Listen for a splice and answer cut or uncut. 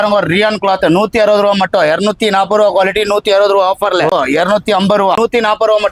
cut